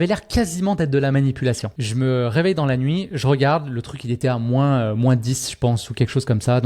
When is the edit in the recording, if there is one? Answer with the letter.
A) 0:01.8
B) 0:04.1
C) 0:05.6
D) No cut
A